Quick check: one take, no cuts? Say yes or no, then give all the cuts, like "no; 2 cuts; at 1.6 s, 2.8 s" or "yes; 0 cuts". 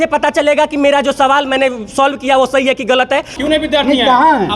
no; 1 cut; at 3.3 s